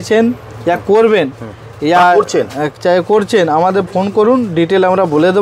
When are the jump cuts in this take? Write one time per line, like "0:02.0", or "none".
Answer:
none